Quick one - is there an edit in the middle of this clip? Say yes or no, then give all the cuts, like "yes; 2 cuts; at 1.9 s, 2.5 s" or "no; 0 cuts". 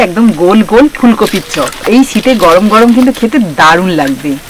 no; 0 cuts